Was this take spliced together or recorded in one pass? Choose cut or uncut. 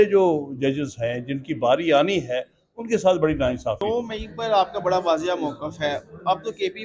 cut